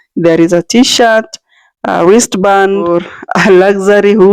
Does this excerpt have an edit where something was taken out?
yes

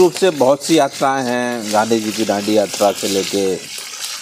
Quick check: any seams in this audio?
no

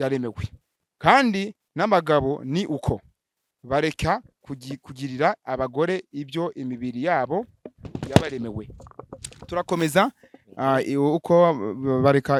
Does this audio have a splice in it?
no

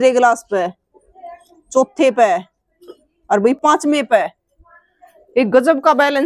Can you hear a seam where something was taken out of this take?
no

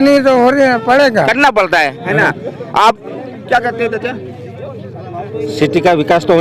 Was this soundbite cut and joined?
no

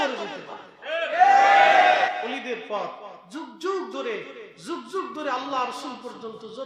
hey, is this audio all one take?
no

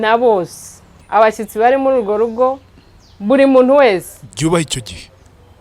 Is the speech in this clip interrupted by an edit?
yes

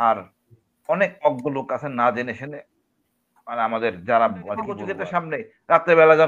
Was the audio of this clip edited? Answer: yes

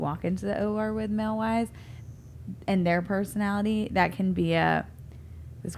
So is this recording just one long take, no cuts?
yes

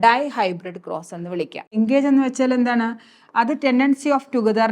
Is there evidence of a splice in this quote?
yes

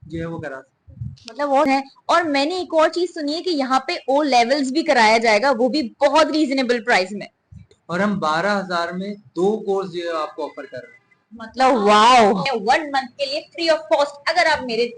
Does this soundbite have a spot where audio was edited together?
yes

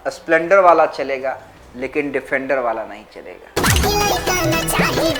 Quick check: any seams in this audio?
no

